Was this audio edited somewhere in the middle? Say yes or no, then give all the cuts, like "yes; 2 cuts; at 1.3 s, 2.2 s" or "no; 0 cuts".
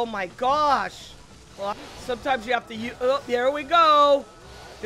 yes; 1 cut; at 1.7 s